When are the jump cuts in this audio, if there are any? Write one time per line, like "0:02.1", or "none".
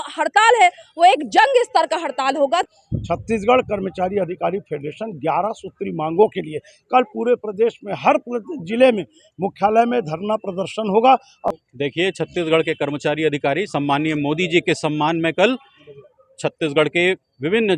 0:02.7
0:11.5